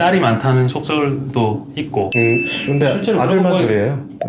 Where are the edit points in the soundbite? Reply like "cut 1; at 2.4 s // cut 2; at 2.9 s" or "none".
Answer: none